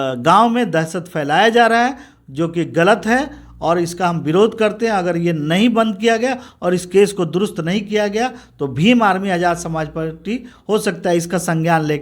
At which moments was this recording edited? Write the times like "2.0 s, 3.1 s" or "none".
none